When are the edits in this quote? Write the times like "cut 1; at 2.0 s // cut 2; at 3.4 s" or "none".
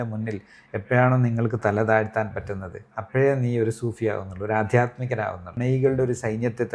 cut 1; at 5.5 s